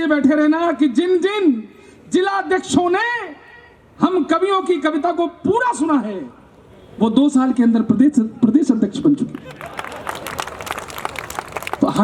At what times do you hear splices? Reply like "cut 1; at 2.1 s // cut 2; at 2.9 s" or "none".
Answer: none